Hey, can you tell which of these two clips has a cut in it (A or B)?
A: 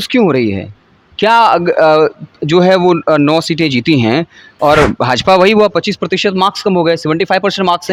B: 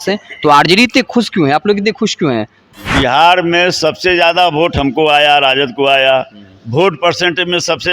B